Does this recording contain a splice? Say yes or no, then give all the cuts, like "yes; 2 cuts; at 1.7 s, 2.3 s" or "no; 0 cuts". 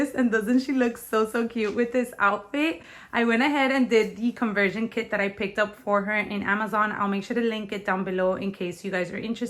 no; 0 cuts